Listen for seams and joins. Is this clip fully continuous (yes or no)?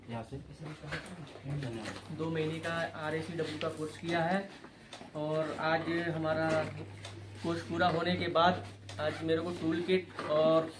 no